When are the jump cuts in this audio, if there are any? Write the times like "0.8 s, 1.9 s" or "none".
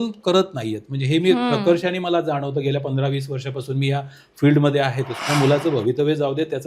5.1 s